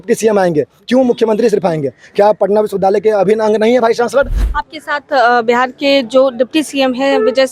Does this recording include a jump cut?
yes; 1 cut; at 4.4 s

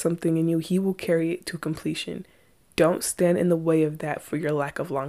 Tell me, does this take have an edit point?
no; 0 cuts

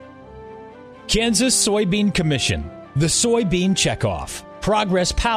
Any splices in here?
yes; 1 cut; at 0.9 s

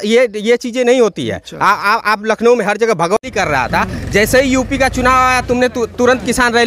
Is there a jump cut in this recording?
no; 0 cuts

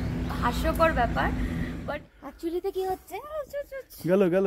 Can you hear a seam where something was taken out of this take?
yes; 1 cut; at 1.8 s

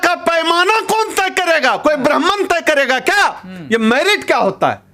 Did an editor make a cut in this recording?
no; 0 cuts

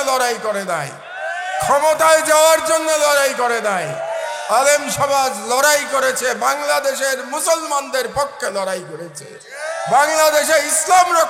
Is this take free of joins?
yes; 0 cuts

